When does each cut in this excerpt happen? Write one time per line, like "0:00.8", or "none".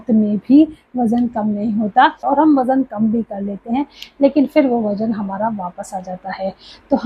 0:02.2